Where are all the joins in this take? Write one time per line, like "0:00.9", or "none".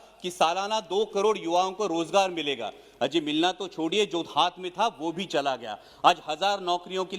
none